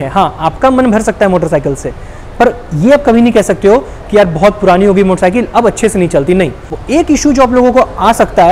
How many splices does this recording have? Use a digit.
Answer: 1